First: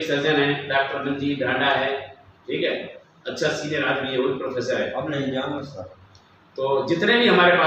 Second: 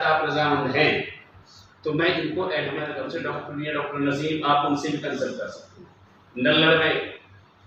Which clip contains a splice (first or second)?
second